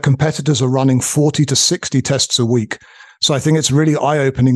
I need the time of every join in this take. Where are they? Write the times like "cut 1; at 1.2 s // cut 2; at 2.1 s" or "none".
none

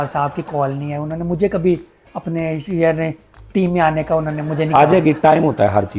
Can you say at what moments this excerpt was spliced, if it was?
none

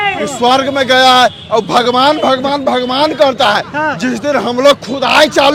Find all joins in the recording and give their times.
none

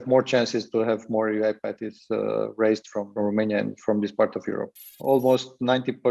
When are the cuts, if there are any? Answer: cut 1; at 3.1 s // cut 2; at 4.8 s

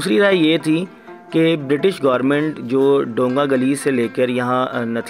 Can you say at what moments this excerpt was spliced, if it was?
none

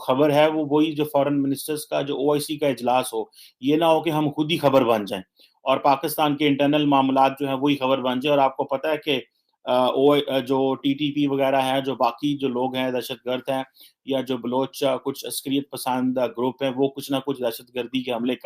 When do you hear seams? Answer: none

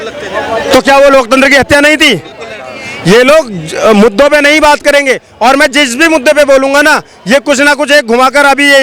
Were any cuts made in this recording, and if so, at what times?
none

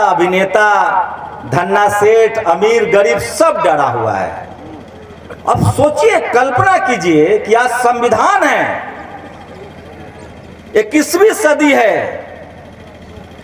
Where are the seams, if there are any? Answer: none

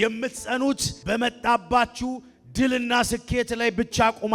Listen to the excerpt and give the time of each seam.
cut 1; at 0.9 s

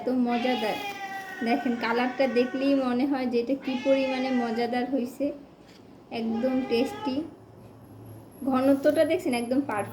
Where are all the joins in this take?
none

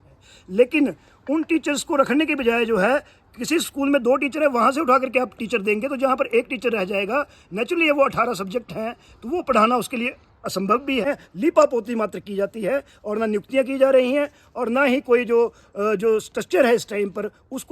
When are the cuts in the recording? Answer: cut 1; at 11.0 s

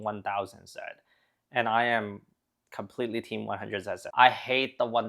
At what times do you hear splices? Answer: cut 1; at 4.0 s

